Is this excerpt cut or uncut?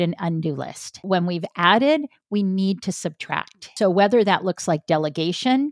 cut